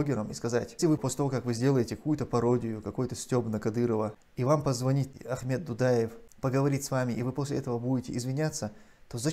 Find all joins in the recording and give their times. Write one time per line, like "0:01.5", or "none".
0:01.0
0:04.2
0:05.1
0:06.2